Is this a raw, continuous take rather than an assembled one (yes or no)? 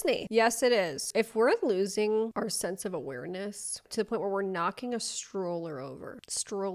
no